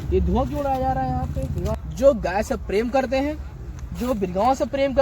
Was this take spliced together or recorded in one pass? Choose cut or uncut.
cut